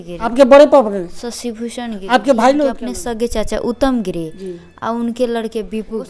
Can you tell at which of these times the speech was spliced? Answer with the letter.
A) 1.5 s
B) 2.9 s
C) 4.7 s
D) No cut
B